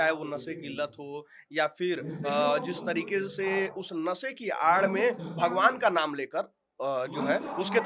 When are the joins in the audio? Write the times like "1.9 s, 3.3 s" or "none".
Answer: none